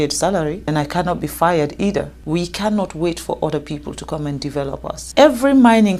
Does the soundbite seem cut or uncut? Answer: cut